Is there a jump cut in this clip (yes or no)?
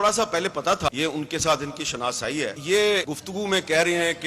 yes